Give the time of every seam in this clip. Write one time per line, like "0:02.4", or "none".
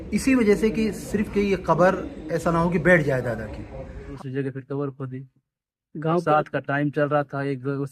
0:04.1

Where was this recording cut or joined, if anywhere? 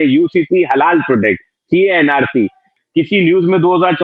0:02.7

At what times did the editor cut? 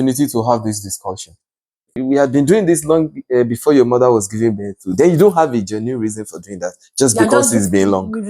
0:02.0

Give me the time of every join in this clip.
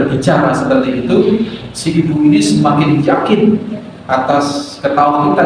none

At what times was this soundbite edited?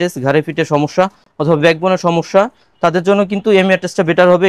none

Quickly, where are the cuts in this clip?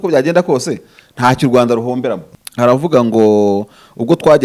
0:02.3

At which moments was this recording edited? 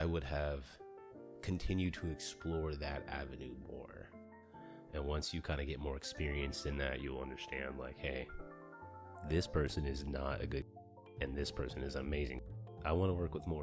0:04.2
0:11.1
0:12.5

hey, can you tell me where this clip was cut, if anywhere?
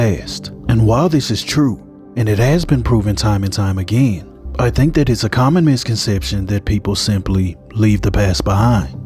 none

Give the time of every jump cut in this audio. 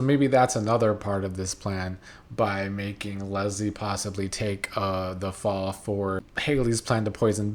0:06.3

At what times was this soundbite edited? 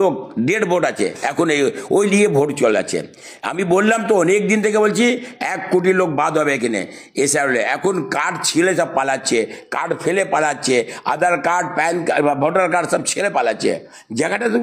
none

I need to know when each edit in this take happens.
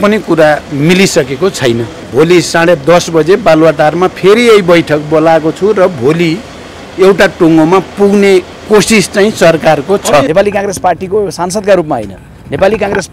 0:02.1
0:10.3

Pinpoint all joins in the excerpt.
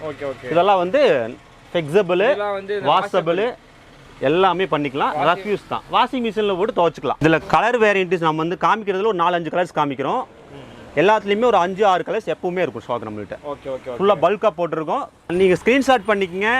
0:07.2
0:15.3

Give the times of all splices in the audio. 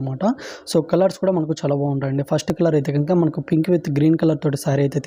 none

